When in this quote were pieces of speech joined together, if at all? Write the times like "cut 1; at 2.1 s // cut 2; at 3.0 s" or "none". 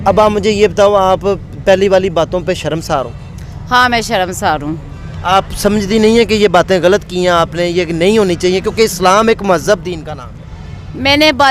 none